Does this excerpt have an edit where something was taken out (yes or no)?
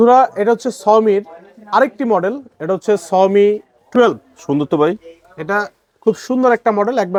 no